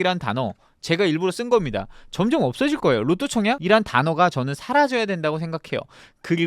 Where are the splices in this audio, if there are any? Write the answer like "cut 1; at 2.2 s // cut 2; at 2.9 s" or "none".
cut 1; at 3.6 s